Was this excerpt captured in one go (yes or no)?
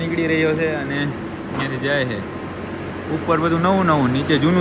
yes